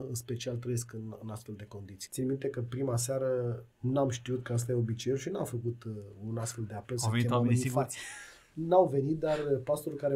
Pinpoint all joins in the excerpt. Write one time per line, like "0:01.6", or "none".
0:01.9